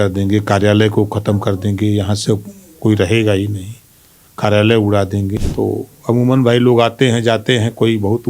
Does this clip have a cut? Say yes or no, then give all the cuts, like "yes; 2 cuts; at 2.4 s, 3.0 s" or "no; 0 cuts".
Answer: yes; 1 cut; at 5.4 s